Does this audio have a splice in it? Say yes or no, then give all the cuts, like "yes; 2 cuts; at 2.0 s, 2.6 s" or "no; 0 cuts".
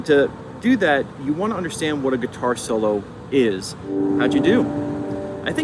yes; 1 cut; at 3.8 s